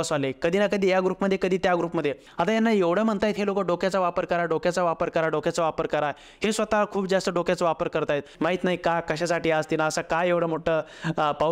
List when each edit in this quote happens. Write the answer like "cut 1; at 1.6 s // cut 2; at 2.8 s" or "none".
cut 1; at 2.2 s // cut 2; at 8.3 s